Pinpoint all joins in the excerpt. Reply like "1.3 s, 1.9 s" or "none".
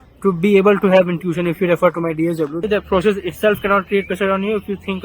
2.6 s